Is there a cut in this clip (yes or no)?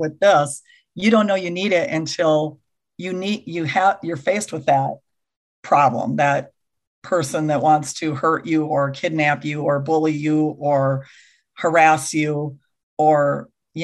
no